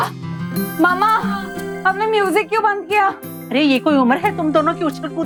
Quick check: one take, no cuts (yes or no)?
yes